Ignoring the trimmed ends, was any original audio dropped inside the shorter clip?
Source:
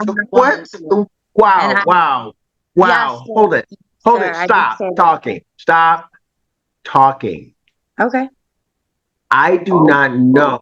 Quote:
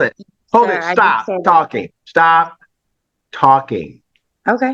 no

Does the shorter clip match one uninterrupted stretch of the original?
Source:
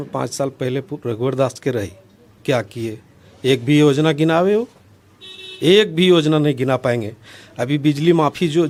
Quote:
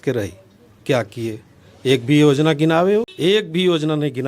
no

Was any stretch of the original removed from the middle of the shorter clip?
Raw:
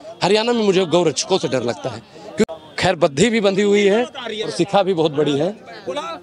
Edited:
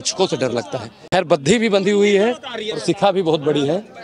yes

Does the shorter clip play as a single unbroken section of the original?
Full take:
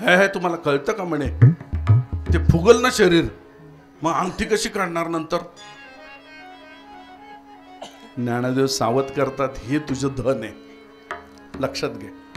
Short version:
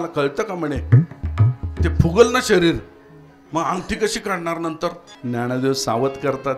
no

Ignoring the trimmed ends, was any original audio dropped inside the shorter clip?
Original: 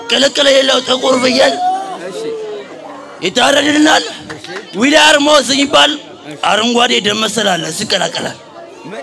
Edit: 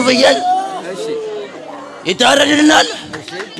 no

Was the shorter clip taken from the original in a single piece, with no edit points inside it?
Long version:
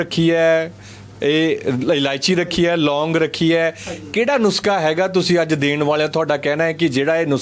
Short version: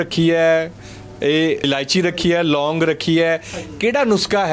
no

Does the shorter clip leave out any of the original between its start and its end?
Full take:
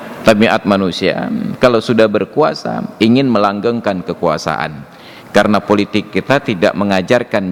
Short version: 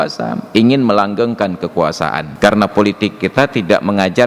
yes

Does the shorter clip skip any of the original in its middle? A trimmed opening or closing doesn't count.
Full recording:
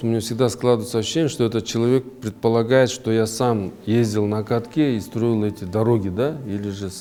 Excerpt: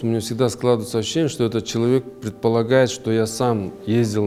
no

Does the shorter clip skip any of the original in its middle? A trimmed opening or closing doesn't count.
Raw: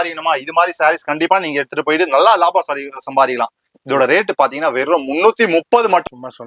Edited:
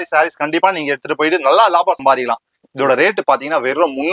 yes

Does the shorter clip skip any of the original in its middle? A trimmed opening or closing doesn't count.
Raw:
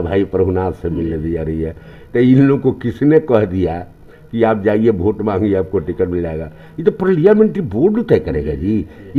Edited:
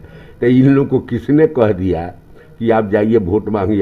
no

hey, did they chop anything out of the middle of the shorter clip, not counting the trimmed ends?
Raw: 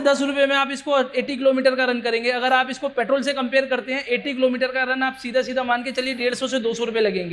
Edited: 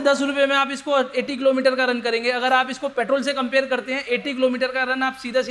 no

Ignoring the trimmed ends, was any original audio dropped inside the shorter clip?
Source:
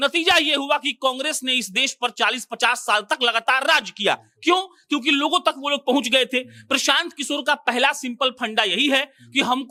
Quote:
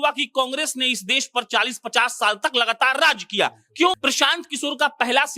yes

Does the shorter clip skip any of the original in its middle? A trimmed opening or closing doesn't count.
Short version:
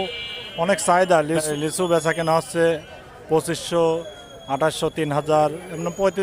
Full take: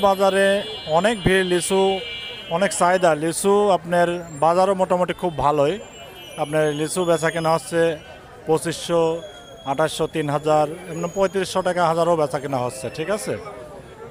yes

